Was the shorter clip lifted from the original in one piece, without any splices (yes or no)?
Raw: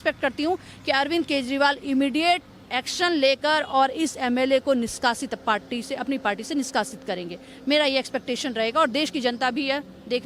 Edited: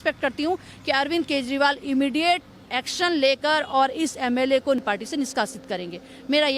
no